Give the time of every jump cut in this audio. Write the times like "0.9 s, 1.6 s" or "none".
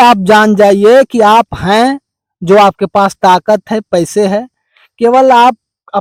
none